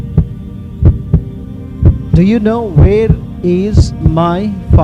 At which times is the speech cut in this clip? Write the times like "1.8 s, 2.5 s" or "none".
1.6 s